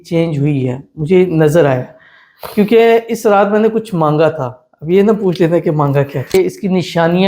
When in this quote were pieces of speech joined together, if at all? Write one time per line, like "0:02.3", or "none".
0:06.3